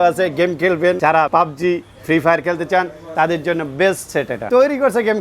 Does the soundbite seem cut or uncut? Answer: cut